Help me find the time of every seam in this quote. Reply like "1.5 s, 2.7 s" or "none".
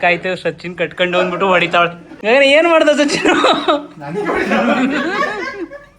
2.1 s